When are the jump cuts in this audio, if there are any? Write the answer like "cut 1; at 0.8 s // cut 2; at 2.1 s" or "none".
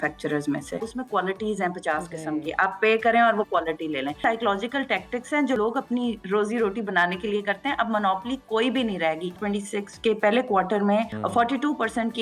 cut 1; at 0.9 s // cut 2; at 4.2 s // cut 3; at 5.6 s // cut 4; at 9.4 s // cut 5; at 11.1 s

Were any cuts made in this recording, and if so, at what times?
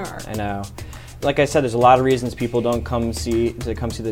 cut 1; at 1.2 s

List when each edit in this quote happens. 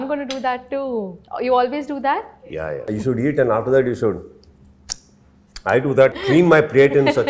cut 1; at 2.8 s // cut 2; at 6.2 s

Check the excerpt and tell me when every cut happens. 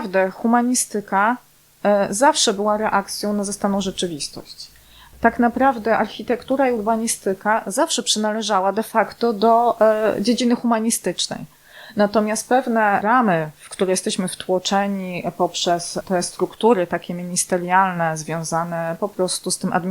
cut 1; at 5.1 s // cut 2; at 13.0 s // cut 3; at 16.0 s

